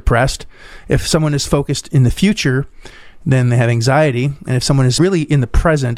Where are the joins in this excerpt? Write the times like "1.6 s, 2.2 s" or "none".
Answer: 4.9 s